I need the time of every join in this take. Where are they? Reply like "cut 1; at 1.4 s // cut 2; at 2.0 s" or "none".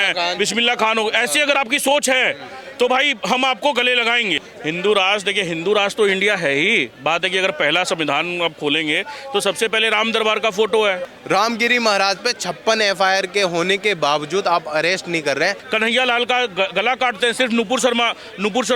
cut 1; at 4.4 s // cut 2; at 11.1 s // cut 3; at 15.6 s